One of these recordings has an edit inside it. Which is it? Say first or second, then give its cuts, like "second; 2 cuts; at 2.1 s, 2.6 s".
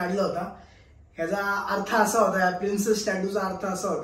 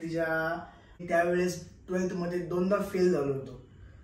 second; 1 cut; at 1.0 s